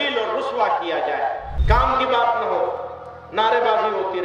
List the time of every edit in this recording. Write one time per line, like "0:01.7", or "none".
0:01.5

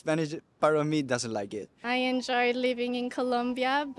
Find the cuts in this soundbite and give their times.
0:01.8

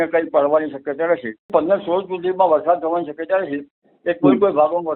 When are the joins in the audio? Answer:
0:01.5

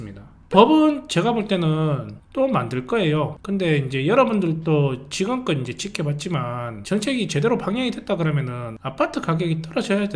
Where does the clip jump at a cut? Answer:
none

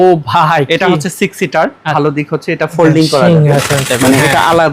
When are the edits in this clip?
0:01.9

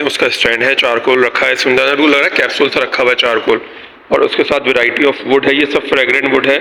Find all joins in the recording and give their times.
none

